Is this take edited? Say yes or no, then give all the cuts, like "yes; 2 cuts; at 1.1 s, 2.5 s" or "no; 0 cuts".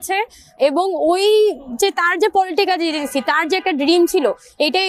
no; 0 cuts